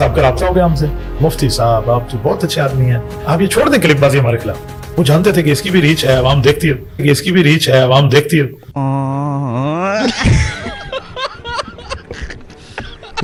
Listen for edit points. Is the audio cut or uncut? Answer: uncut